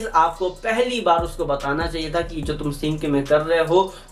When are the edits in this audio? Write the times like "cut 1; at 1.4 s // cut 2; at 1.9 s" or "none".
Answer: none